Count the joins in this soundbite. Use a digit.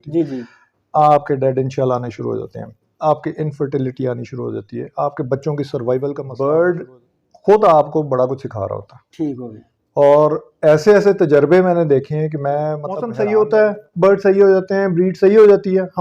2